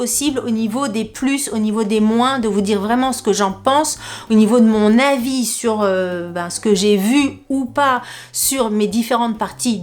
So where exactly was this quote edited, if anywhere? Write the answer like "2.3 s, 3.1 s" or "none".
none